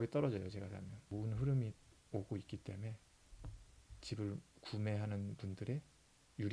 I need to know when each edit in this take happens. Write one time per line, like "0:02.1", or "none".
0:01.0